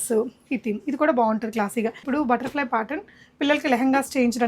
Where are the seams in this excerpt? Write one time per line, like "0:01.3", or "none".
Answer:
0:02.0